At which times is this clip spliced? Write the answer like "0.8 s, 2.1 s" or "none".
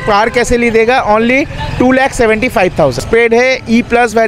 3.0 s